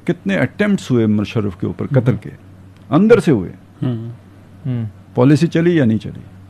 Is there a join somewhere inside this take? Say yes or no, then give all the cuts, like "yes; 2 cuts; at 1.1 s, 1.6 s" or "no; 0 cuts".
no; 0 cuts